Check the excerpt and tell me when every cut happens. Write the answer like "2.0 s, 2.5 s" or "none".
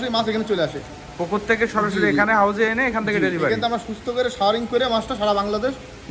none